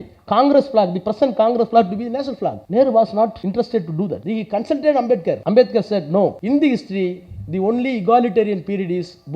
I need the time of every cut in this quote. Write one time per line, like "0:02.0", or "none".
0:02.6
0:03.4
0:04.2
0:05.4
0:06.4